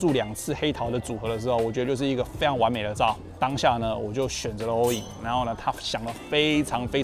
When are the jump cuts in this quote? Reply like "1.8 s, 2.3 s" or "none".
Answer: 3.3 s